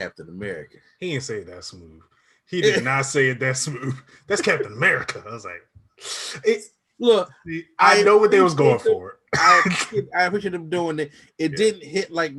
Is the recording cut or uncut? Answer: uncut